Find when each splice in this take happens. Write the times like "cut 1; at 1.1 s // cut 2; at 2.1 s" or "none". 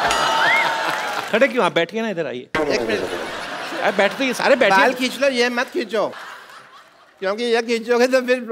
cut 1; at 1.2 s // cut 2; at 6.3 s